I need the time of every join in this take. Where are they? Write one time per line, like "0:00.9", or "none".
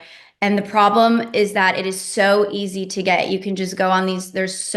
none